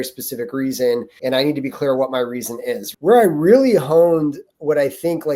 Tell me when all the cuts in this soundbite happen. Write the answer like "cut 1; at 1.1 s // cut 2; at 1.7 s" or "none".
cut 1; at 1.1 s // cut 2; at 2.9 s